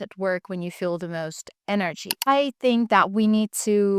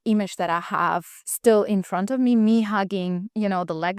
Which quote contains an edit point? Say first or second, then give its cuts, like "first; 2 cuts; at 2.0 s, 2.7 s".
first; 1 cut; at 2.2 s